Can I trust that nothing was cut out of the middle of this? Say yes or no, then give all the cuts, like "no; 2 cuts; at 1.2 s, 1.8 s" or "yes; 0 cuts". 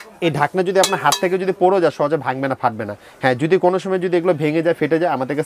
yes; 0 cuts